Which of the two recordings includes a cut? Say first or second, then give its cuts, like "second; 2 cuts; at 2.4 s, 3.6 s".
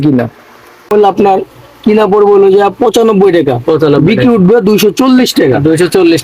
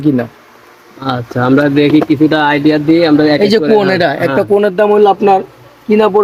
first; 1 cut; at 0.9 s